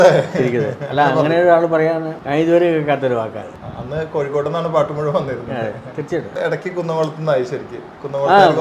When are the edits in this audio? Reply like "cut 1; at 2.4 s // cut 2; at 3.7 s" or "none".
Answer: cut 1; at 2.1 s // cut 2; at 3.6 s // cut 3; at 6.4 s